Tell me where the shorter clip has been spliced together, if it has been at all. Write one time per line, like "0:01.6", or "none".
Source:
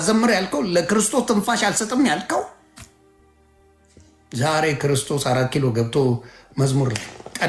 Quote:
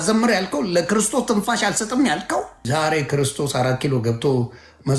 0:02.6